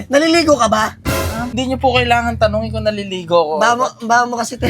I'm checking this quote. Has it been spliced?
yes; 1 cut; at 1.6 s

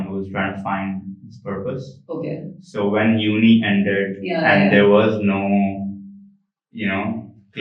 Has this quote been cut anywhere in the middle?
no; 0 cuts

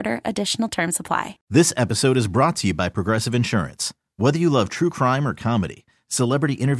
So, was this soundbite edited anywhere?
yes; 1 cut; at 1.4 s

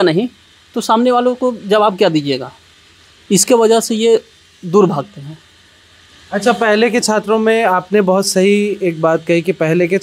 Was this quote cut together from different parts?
no; 0 cuts

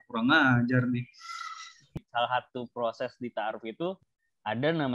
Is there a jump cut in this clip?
yes; 1 cut; at 2.0 s

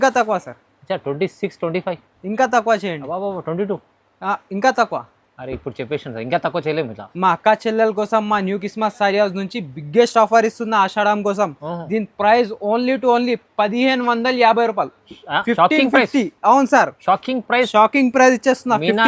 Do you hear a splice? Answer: no; 0 cuts

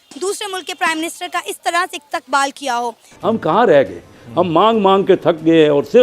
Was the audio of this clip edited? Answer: yes; 1 cut; at 3.1 s

